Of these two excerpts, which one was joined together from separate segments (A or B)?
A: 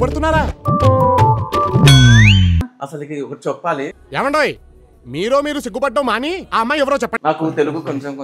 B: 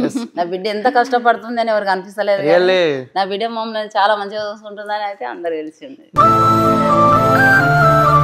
A